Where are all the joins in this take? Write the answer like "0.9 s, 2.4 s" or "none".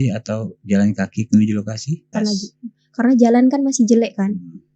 2.1 s